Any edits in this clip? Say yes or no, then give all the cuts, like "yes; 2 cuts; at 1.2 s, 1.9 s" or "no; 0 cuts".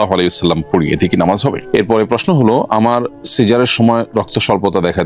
yes; 1 cut; at 1.6 s